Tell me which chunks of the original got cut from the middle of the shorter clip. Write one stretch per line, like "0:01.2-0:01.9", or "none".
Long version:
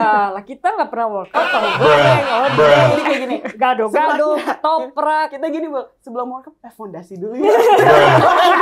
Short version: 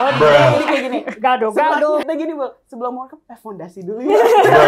0:04.4-0:05.4

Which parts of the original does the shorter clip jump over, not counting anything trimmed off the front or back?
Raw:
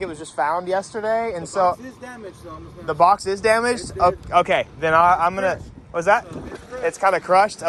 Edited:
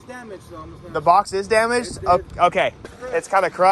0:04.7-0:06.5

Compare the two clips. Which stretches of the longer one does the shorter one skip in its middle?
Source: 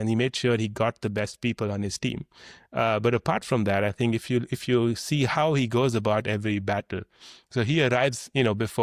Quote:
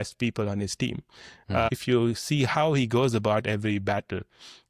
0:02.9-0:04.5

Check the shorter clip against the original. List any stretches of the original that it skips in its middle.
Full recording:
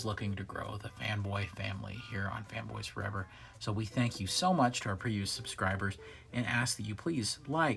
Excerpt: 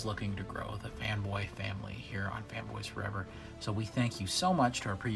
none

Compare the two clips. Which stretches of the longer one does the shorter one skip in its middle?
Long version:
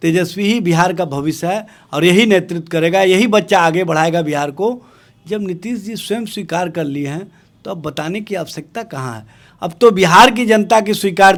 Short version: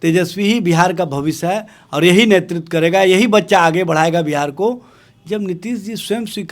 none

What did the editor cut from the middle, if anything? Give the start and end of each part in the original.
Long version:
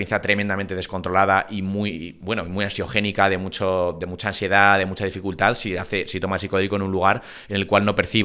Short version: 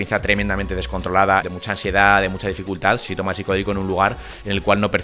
0:01.5-0:04.1
0:05.6-0:06.1

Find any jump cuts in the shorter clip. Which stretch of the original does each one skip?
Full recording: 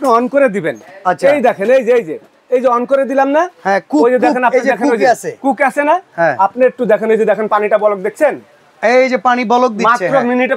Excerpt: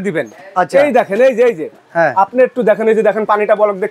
0:02.4-0:06.1

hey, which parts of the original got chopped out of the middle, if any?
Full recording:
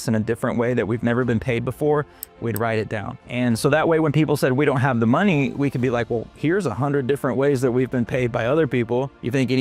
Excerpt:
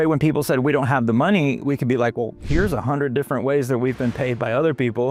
none

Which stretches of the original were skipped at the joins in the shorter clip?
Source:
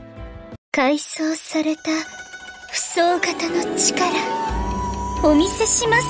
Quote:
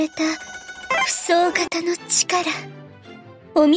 none

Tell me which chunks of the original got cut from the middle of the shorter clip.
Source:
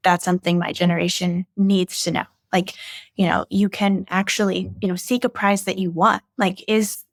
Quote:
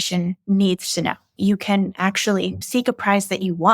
0:02.4-0:03.5
0:04.8-0:05.0

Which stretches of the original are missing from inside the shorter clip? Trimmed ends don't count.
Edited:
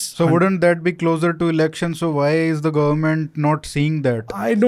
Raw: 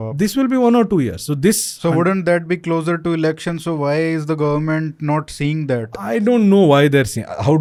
none

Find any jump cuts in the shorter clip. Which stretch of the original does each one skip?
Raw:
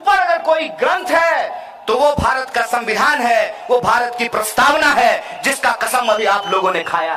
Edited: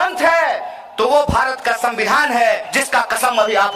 0:03.6-0:05.4

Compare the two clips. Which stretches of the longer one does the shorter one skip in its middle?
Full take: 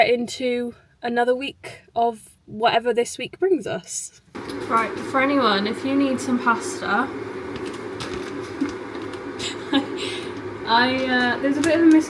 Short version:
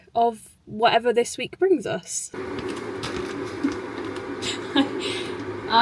0:04.2-0:07.3

